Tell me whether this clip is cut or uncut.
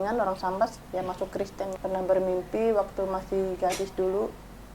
cut